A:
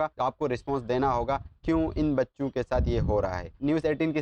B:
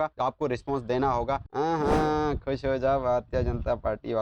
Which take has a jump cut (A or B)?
B